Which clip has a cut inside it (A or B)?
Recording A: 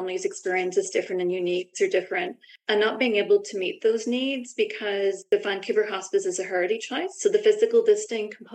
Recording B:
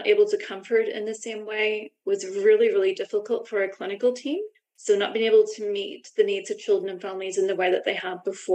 A